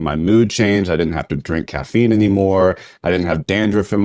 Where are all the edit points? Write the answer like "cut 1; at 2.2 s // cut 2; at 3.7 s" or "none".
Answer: none